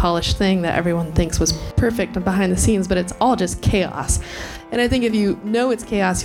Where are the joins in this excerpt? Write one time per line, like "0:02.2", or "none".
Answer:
0:01.6